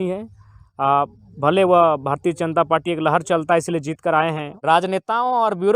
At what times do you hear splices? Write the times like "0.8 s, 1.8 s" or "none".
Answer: 4.5 s

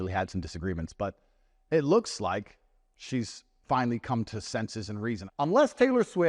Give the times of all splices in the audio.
5.2 s

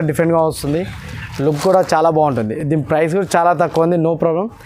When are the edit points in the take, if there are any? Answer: none

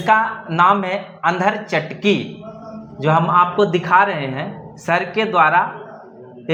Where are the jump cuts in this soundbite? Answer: none

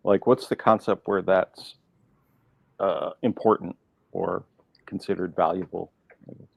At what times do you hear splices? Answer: none

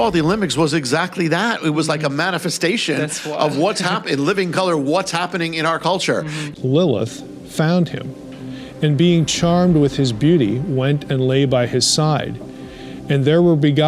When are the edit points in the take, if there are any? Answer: 6.5 s

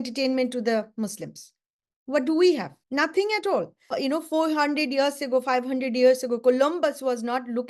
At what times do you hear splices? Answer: 2.8 s, 3.9 s

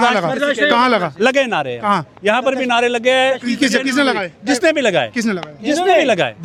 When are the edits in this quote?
none

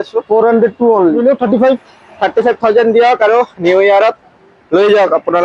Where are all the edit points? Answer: 1.2 s

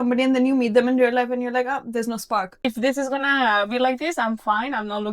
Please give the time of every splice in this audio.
2.6 s

